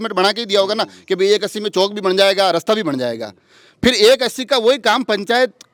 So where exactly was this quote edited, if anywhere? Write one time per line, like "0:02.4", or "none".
none